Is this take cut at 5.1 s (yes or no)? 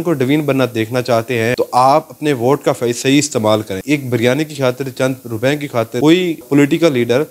no